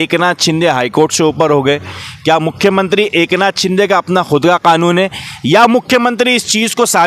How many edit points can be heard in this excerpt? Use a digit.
0